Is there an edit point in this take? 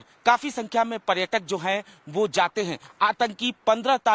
no; 0 cuts

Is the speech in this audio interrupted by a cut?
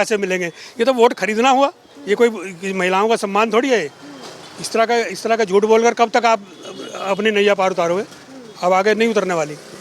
no; 0 cuts

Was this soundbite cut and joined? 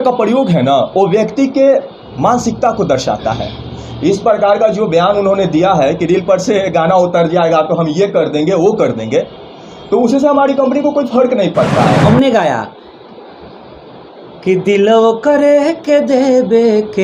yes; 1 cut; at 12.0 s

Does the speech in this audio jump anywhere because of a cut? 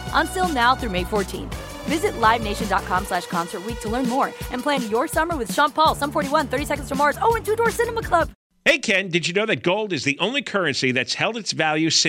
yes; 1 cut; at 8.4 s

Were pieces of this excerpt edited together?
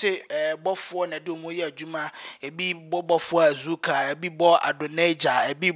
no; 0 cuts

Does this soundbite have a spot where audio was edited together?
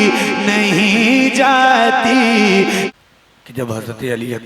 yes; 1 cut; at 2.9 s

